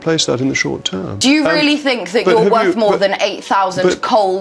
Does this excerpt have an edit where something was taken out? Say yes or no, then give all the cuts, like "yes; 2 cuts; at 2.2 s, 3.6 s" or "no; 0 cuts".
yes; 1 cut; at 1.1 s